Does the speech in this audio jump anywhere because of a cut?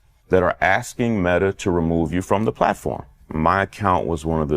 yes; 1 cut; at 3.2 s

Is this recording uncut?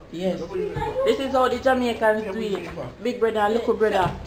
yes; 0 cuts

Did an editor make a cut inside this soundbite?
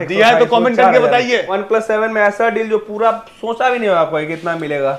yes; 1 cut; at 1.6 s

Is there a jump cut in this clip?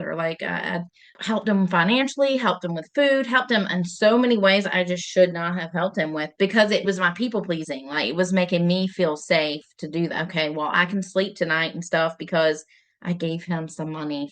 yes; 2 cuts; at 1.0 s, 6.8 s

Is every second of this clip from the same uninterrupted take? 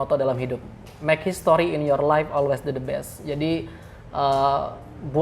yes; 0 cuts

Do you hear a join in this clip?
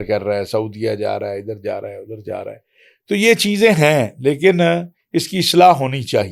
no; 0 cuts

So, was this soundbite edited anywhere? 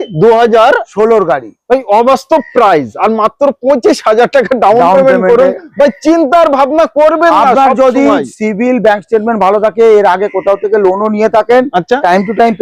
no; 0 cuts

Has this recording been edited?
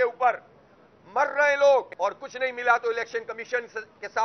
yes; 1 cut; at 1.9 s

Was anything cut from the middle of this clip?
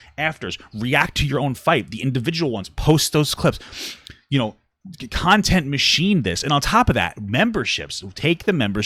no; 0 cuts

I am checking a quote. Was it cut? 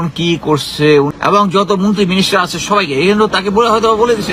yes; 1 cut; at 1.1 s

